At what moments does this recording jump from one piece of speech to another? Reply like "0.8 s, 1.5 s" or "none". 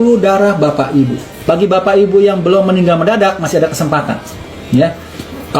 1.3 s